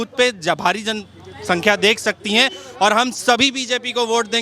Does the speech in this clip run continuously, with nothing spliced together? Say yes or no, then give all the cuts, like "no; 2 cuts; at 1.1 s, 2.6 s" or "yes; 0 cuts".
yes; 0 cuts